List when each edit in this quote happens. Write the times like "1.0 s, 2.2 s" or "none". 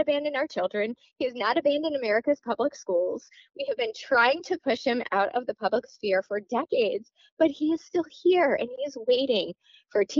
none